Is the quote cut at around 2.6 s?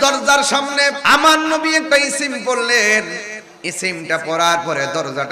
no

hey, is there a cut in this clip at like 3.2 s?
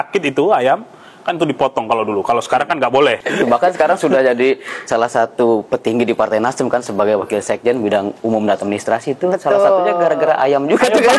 yes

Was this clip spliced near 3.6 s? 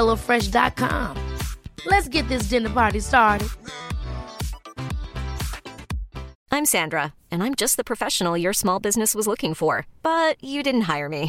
no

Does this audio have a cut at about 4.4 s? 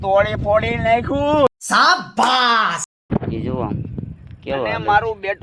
no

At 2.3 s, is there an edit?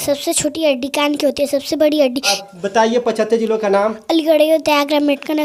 yes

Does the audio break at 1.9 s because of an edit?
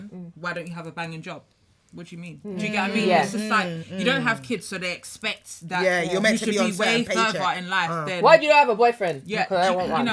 no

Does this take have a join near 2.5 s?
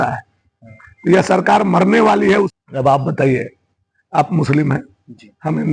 yes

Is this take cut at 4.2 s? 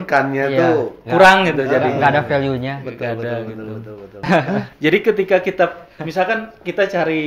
yes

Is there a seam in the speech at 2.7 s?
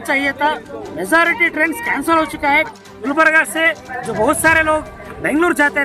yes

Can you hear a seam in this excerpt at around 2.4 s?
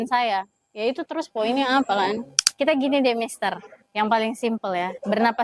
yes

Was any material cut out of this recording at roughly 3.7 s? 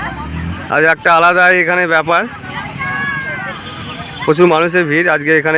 no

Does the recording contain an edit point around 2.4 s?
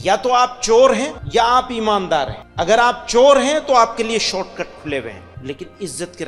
yes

